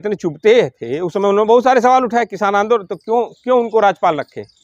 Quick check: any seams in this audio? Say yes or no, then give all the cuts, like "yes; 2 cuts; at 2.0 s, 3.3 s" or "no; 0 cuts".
no; 0 cuts